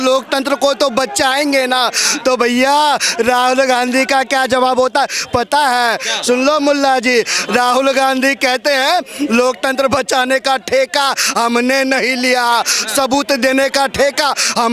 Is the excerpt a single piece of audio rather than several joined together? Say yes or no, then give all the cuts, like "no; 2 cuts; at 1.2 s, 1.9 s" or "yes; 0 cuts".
yes; 0 cuts